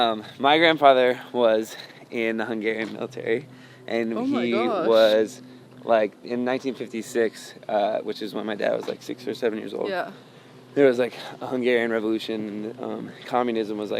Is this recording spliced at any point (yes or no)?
no